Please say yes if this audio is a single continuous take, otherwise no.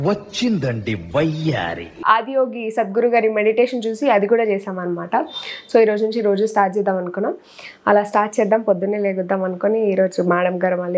no